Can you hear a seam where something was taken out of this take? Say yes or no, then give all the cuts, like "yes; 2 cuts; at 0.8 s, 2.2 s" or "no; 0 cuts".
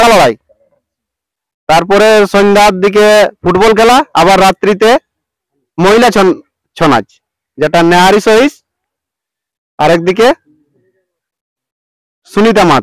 no; 0 cuts